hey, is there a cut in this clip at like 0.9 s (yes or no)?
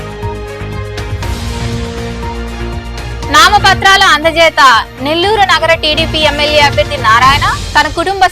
yes